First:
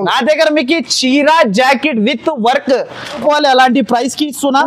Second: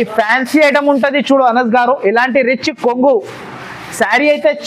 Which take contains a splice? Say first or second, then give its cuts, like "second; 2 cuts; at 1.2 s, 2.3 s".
first; 1 cut; at 3.2 s